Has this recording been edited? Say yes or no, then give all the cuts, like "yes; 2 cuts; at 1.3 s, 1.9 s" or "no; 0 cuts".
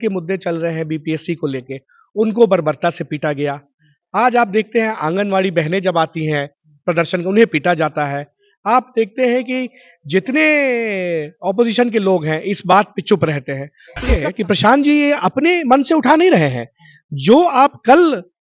yes; 1 cut; at 14.3 s